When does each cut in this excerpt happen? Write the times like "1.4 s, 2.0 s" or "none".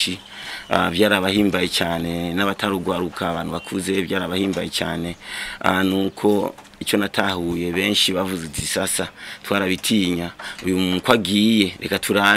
none